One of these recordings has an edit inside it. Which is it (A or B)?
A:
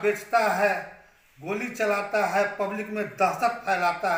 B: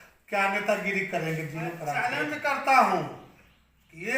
B